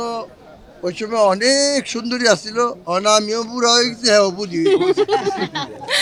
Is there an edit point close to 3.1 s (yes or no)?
no